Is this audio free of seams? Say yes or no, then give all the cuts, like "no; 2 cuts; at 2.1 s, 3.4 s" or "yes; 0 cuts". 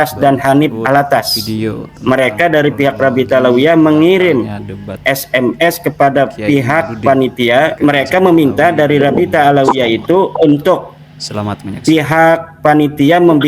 no; 2 cuts; at 1.9 s, 7.7 s